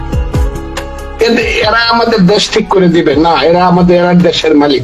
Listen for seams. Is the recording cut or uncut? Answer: uncut